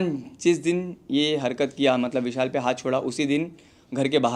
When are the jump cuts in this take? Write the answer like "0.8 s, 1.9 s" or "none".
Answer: none